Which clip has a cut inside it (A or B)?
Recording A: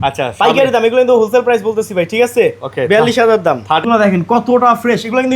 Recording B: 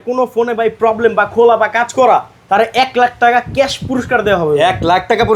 A